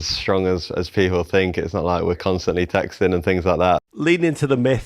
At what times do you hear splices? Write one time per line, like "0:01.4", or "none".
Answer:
0:03.9